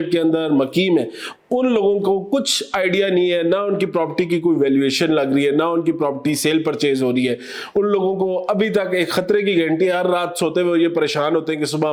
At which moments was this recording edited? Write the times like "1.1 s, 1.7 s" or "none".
none